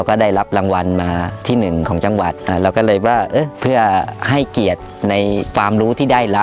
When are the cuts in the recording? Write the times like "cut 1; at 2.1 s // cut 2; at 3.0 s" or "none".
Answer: cut 1; at 1.4 s // cut 2; at 2.4 s // cut 3; at 3.5 s // cut 4; at 4.2 s